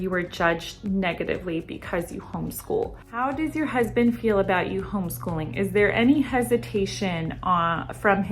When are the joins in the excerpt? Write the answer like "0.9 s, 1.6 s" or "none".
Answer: 3.2 s